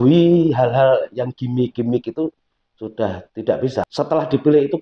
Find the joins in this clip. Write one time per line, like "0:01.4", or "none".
0:03.8